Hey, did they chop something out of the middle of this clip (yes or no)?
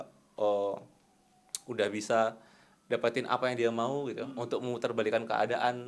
no